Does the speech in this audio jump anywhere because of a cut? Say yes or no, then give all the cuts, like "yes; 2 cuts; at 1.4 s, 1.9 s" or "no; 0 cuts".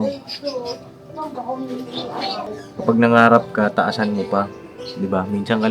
yes; 1 cut; at 2.5 s